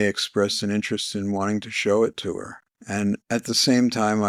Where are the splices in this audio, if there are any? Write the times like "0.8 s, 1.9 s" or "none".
none

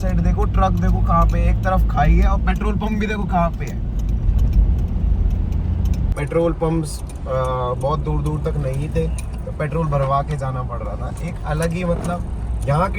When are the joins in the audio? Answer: 6.1 s

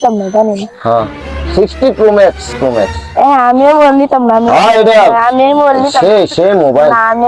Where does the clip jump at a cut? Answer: 2.5 s

